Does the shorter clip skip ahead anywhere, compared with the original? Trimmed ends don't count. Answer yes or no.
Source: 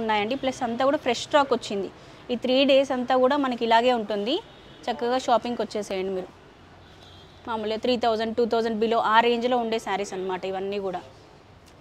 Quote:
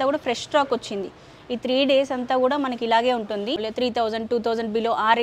yes